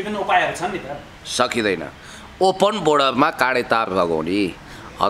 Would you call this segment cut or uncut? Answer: uncut